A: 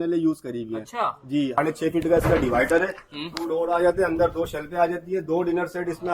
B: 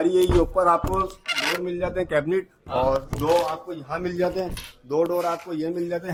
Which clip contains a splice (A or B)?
A